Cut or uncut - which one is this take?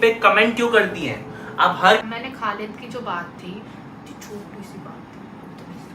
cut